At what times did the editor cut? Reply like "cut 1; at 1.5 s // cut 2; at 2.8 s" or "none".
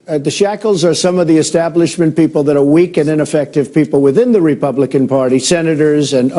cut 1; at 2.1 s